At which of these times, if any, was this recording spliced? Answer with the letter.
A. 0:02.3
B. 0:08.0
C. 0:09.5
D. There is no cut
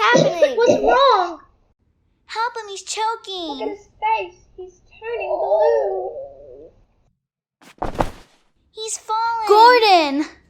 C